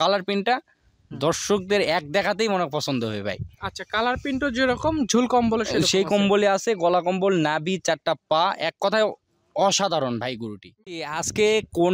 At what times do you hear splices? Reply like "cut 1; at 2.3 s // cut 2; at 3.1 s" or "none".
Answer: cut 1; at 11.0 s